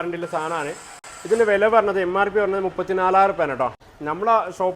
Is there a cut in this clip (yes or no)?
yes